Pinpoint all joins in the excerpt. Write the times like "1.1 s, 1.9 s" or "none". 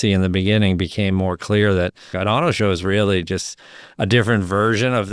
2.1 s